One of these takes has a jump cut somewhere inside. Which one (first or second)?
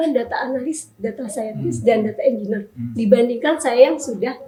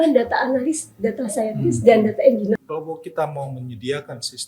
second